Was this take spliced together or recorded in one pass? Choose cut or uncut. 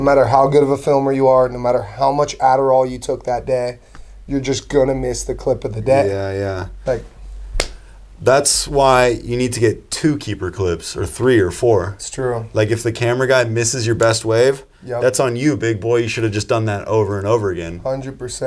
uncut